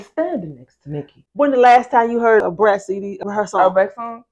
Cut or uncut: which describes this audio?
cut